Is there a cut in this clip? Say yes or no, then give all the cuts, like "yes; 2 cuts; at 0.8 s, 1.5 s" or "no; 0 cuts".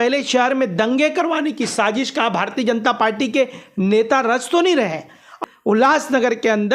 yes; 1 cut; at 5.3 s